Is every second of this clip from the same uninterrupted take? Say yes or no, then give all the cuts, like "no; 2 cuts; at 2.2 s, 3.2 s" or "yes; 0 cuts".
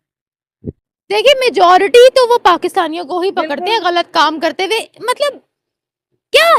yes; 0 cuts